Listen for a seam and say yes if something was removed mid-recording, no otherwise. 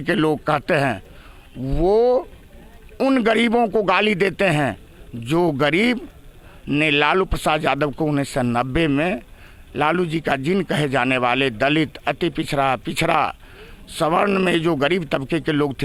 no